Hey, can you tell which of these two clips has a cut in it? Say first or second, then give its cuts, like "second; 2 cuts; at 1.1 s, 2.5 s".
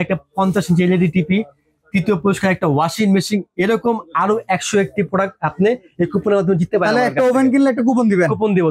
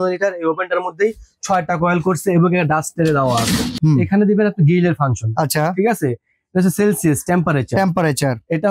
second; 1 cut; at 3.7 s